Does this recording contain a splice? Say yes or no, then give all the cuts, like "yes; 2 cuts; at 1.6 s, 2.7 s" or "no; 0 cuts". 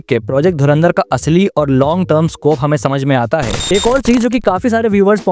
yes; 1 cut; at 3.6 s